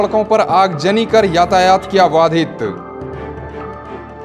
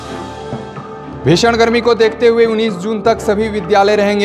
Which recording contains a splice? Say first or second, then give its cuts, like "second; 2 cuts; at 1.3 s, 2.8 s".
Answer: second; 1 cut; at 1.2 s